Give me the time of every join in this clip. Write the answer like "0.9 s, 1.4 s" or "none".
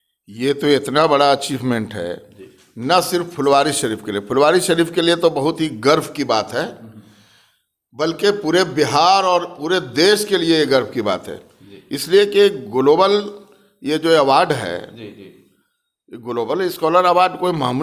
none